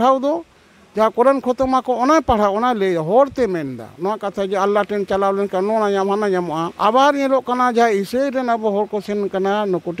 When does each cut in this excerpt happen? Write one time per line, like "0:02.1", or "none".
0:06.7